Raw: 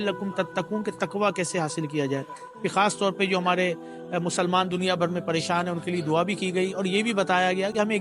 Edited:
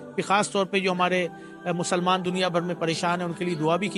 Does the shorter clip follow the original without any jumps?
yes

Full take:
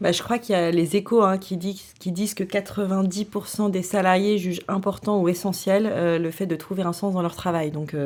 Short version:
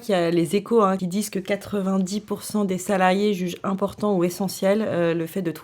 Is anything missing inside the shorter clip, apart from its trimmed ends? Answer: yes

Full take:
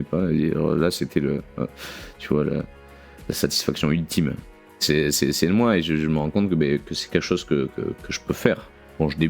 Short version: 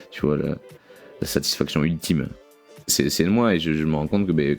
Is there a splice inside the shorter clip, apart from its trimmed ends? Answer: yes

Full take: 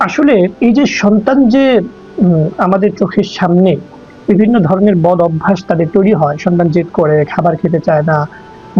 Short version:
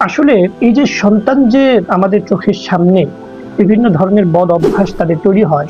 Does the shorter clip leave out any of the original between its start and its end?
yes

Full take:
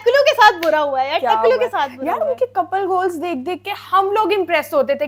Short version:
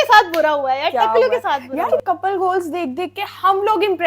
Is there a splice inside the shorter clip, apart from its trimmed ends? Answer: yes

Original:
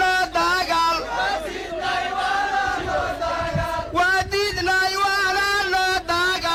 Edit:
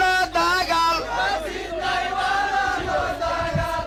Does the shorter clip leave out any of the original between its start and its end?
no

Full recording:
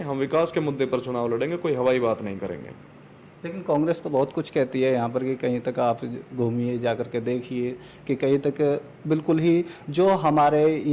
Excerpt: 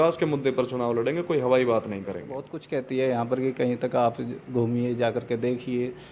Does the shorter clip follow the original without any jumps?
no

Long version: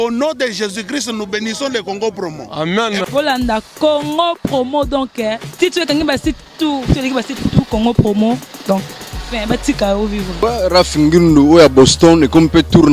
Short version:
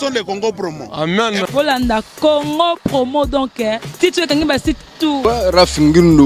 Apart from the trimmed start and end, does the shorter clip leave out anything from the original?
yes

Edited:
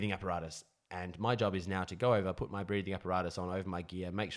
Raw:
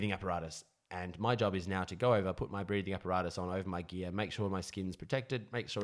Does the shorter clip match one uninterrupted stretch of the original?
yes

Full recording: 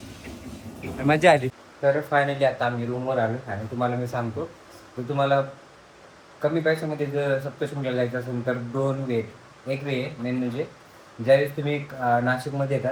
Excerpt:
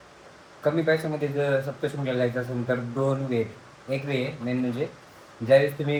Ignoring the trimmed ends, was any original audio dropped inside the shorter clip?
no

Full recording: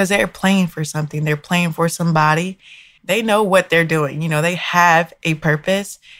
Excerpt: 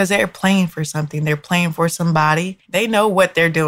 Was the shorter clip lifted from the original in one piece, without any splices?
no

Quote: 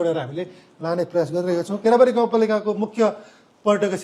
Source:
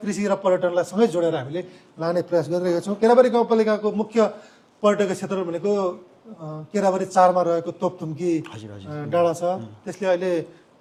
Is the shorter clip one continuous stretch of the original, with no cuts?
yes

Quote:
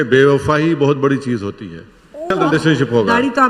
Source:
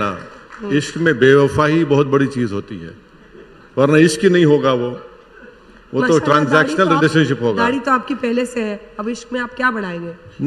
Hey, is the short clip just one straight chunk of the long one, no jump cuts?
no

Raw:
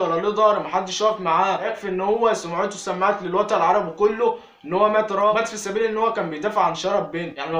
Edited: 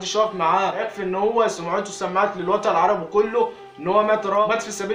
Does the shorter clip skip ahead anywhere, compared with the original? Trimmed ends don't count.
no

